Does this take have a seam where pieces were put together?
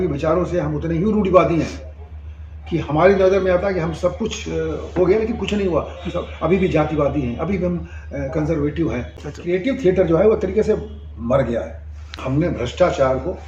yes; 2 cuts; at 9.3 s, 12.2 s

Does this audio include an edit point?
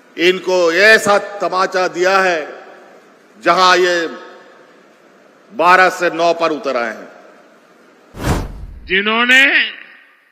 yes; 1 cut; at 8.3 s

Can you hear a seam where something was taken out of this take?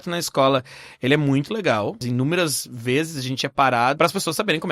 yes; 2 cuts; at 2.0 s, 4.0 s

